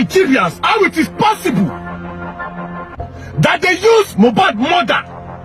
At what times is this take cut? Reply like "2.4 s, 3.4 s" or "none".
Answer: none